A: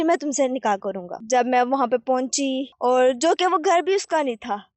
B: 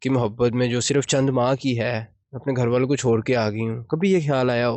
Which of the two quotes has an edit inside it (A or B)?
A